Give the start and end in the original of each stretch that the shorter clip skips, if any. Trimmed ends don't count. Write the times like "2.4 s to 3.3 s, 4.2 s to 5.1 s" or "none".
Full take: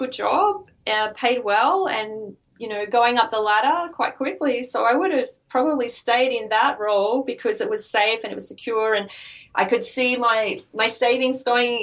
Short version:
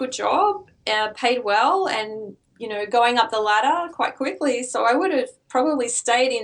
none